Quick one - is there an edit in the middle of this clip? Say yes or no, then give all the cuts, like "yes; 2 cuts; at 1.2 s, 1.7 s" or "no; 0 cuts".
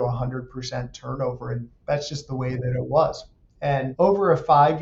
yes; 1 cut; at 3.9 s